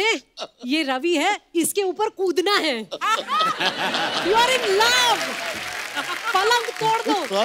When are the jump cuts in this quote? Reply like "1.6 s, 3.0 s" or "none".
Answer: none